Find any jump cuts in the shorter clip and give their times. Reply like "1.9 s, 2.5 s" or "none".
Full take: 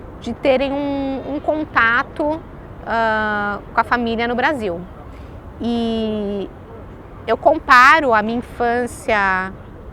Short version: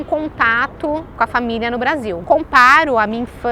1.1 s, 2.2 s